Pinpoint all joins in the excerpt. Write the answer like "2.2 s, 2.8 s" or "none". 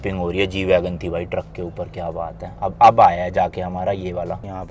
none